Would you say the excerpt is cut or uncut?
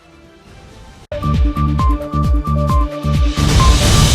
cut